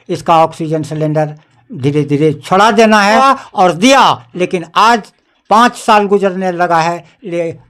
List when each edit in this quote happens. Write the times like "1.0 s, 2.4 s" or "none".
3.2 s